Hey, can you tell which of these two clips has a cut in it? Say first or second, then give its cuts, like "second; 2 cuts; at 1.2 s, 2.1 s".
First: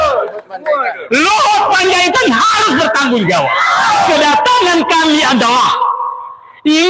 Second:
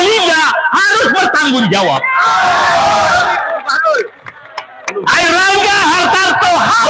first; 1 cut; at 4.1 s